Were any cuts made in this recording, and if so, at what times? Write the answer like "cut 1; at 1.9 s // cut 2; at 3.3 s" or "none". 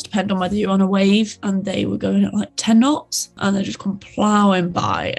cut 1; at 1.4 s // cut 2; at 3.4 s